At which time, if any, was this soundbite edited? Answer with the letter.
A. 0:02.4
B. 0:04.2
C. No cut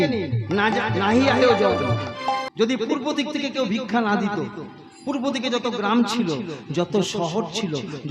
A